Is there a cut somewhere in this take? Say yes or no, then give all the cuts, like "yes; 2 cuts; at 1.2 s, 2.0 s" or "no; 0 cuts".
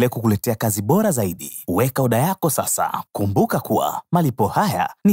yes; 1 cut; at 3.0 s